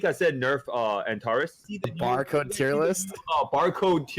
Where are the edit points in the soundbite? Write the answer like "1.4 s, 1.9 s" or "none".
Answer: 1.7 s